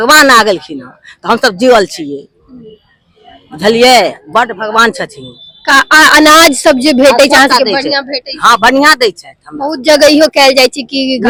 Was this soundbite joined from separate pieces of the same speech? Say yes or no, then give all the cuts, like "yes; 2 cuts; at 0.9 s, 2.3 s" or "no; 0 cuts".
no; 0 cuts